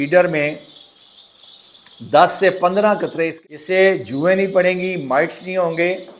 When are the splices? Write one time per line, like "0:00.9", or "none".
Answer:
0:03.3